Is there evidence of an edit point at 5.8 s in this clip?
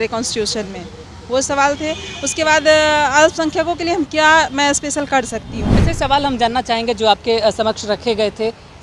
yes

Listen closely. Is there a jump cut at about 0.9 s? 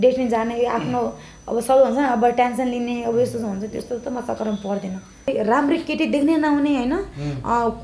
no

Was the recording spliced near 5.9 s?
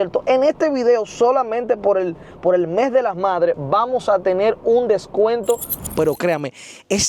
yes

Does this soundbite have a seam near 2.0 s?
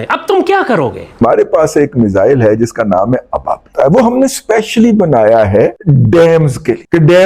no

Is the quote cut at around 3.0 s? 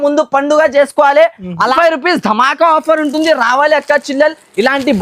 no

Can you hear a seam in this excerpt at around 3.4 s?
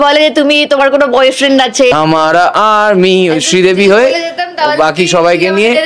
no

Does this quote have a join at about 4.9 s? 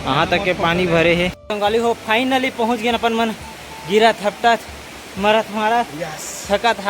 no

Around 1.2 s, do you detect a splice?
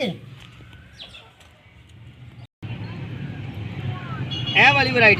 no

